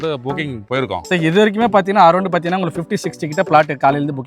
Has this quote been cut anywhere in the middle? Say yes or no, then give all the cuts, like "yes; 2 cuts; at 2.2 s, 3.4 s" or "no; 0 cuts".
no; 0 cuts